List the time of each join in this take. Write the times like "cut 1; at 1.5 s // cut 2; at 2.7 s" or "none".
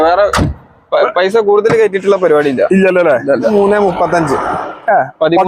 cut 1; at 3.5 s